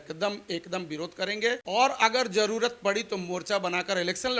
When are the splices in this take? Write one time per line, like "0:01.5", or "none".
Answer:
0:01.6